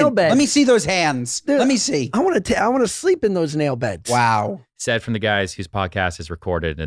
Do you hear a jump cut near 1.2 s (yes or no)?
no